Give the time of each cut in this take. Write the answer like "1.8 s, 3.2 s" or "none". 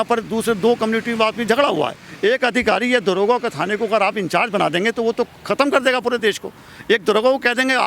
2.0 s